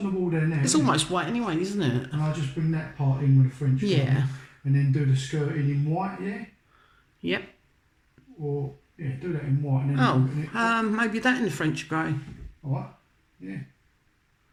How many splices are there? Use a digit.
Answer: 0